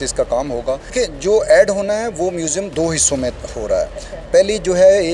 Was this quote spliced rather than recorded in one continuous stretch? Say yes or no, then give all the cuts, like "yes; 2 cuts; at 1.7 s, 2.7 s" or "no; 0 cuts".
yes; 1 cut; at 0.9 s